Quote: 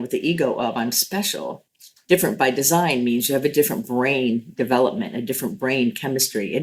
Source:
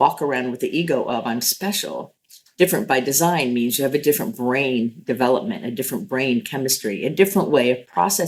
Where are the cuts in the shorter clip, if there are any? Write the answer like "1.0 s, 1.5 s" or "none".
none